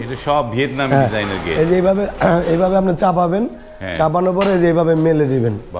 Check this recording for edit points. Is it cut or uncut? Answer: uncut